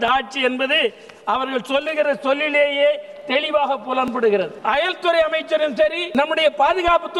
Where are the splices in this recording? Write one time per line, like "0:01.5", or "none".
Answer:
0:04.5
0:06.0